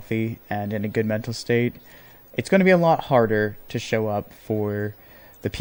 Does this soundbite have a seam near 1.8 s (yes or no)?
no